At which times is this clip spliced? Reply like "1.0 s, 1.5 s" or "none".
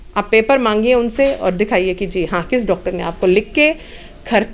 none